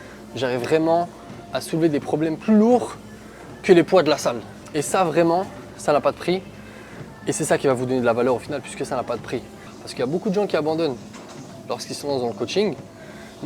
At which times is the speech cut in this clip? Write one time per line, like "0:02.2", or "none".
0:04.5
0:09.7